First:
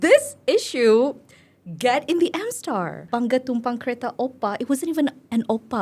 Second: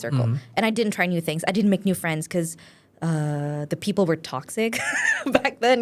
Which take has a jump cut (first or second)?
first